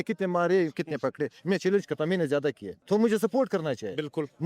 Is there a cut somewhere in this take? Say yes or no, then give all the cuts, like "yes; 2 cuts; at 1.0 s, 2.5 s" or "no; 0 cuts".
yes; 1 cut; at 2.7 s